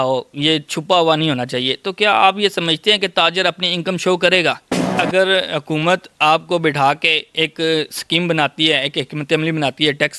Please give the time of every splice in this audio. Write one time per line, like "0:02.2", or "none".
0:04.8